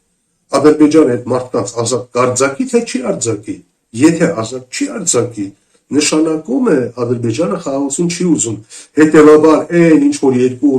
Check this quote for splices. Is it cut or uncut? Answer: uncut